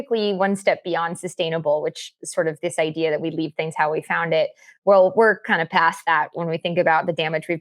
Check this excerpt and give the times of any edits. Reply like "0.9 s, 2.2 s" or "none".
none

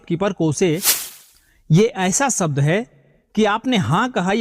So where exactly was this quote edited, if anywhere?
1.0 s

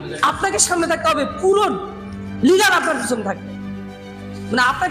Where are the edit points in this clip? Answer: none

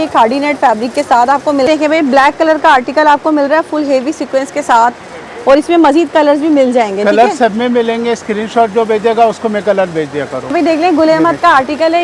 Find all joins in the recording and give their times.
1.7 s, 10.5 s

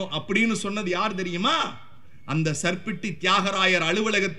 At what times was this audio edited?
none

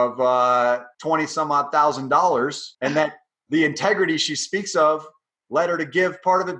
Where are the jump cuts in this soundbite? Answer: 0.9 s, 2.7 s

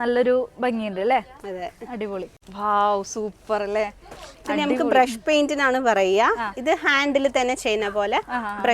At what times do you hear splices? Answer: 2.4 s

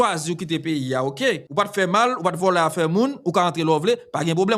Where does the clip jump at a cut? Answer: 1.4 s

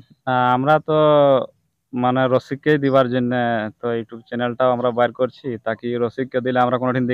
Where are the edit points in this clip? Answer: none

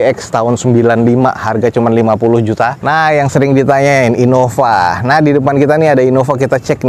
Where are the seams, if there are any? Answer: 2.8 s

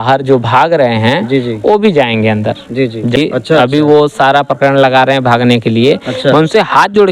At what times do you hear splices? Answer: 3.2 s

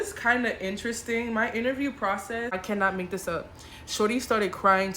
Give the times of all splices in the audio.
2.5 s

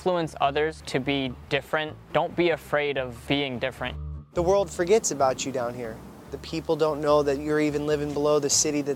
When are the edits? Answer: 0.8 s, 2.0 s, 3.2 s, 4.0 s, 6.4 s

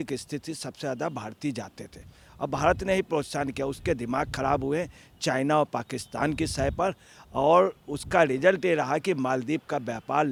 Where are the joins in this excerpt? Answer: none

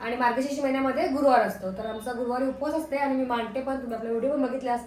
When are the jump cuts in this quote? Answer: none

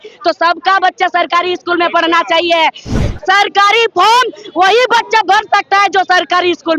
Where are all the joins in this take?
3.0 s

